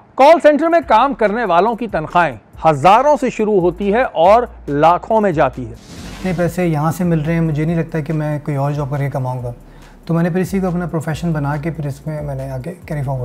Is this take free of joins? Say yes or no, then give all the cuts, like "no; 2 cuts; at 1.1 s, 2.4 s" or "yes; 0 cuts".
no; 1 cut; at 6.2 s